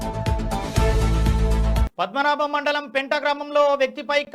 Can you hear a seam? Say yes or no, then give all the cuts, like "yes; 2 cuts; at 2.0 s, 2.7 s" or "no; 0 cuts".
no; 0 cuts